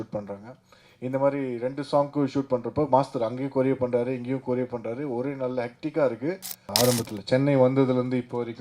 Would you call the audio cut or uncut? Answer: cut